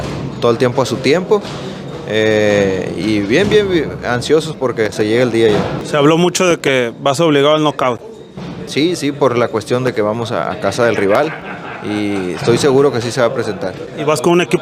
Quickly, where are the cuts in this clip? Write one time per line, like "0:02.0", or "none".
0:05.8